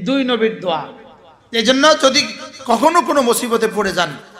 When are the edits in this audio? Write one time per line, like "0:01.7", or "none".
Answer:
none